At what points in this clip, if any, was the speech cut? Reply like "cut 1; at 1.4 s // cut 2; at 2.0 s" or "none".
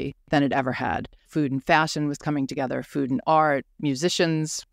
cut 1; at 1.1 s // cut 2; at 3.7 s